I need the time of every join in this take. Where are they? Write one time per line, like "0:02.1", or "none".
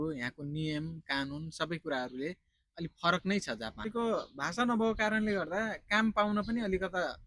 0:03.9